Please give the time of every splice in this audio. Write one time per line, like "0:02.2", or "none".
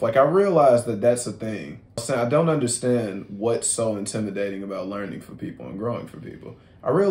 0:02.0